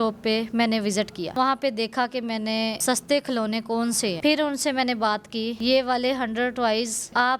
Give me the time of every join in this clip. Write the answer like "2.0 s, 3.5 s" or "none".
1.3 s, 2.8 s, 4.2 s